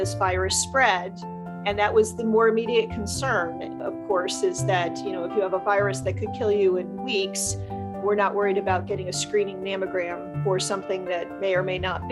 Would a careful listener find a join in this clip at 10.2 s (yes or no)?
yes